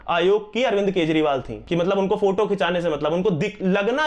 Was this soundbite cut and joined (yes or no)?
yes